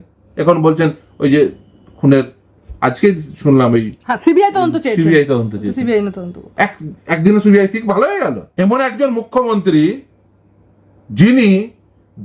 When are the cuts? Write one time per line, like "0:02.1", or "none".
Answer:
0:08.4